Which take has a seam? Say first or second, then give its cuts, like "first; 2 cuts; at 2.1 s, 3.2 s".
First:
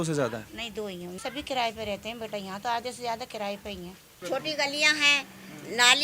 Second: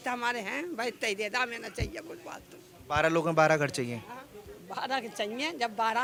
first; 2 cuts; at 1.2 s, 4.2 s